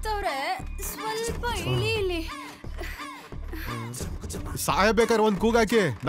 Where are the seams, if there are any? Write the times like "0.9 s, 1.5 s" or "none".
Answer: none